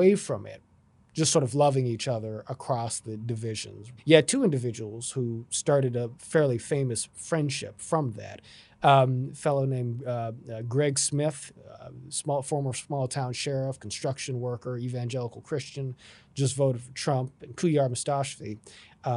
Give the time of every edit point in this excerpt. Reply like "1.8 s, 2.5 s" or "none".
3.8 s